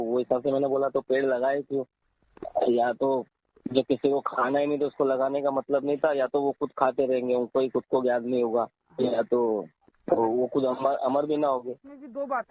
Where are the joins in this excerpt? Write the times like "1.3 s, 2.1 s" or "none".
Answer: none